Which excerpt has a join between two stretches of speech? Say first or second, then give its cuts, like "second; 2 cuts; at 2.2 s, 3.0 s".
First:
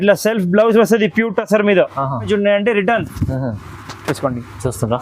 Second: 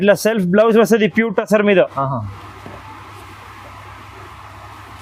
first; 1 cut; at 2.3 s